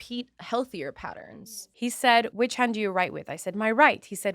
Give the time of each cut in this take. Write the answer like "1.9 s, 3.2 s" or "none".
1.4 s, 2.3 s